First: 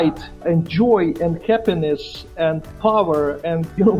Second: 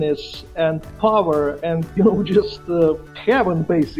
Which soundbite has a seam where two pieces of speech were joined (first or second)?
second